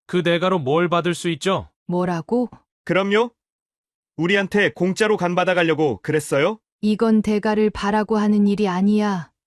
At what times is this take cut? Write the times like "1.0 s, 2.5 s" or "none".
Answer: 1.7 s, 2.6 s, 6.7 s

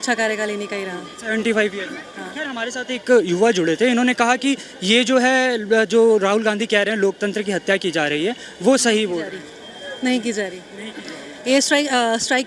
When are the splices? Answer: none

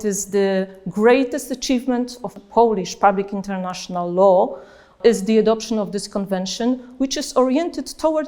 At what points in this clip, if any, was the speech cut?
2.3 s, 5.0 s

